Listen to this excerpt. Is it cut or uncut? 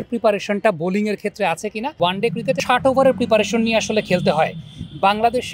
cut